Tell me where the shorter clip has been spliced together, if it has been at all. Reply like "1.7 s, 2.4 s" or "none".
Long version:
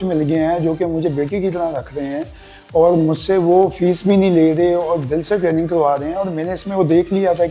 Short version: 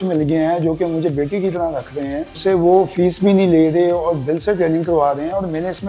2.4 s